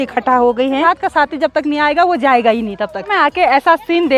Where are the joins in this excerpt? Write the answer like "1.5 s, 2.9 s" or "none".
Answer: 0.8 s, 3.1 s